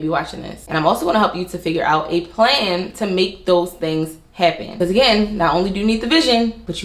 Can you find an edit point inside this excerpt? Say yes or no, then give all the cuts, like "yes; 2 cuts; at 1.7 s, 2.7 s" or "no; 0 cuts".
yes; 1 cut; at 4.7 s